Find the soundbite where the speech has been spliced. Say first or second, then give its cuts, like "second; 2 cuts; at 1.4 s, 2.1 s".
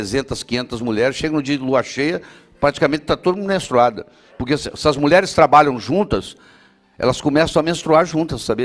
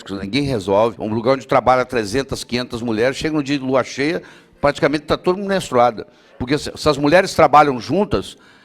second; 1 cut; at 1.0 s